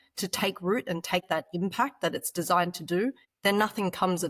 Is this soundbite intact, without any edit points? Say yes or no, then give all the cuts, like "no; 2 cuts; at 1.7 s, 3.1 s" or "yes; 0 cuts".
no; 2 cuts; at 1.2 s, 3.3 s